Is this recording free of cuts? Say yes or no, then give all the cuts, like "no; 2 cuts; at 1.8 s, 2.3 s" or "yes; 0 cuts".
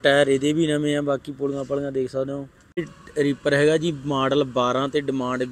no; 1 cut; at 3.0 s